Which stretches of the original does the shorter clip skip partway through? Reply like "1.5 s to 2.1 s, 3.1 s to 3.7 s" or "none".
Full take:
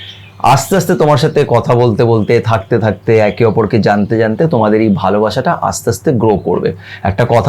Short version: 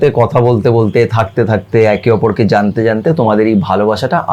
none